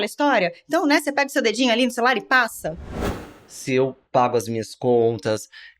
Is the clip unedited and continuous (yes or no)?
no